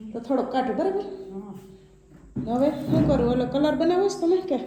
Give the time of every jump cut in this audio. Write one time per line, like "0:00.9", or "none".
none